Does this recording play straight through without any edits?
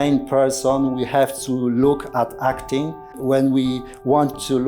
no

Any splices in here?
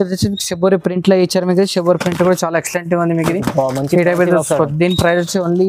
no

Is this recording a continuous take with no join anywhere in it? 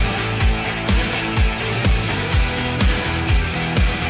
yes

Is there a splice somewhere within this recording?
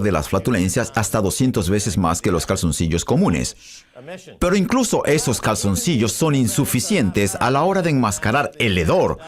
yes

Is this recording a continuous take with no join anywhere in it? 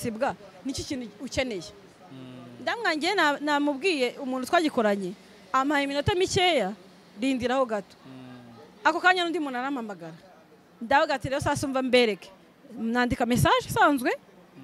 yes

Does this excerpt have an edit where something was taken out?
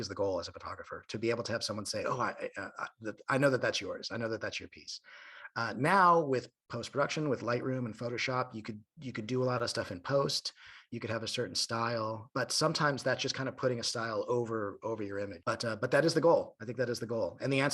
yes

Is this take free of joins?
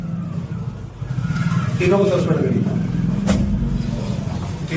yes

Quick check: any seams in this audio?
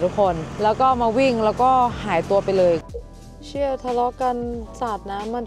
yes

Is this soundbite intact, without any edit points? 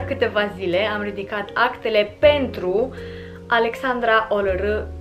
yes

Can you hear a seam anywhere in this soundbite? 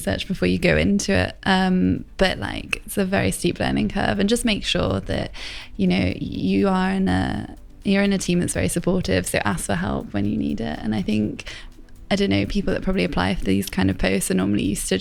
no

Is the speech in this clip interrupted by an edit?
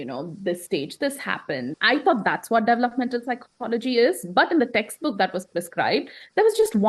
yes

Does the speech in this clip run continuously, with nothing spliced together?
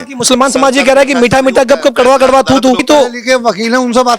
no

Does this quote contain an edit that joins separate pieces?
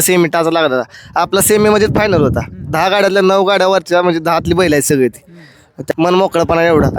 yes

